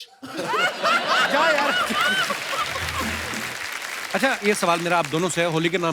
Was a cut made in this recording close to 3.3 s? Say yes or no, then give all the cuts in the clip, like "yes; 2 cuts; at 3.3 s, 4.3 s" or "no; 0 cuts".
yes; 1 cut; at 3.3 s